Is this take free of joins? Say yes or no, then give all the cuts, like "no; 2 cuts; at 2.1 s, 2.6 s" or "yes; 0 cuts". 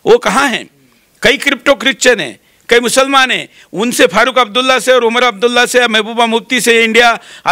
yes; 0 cuts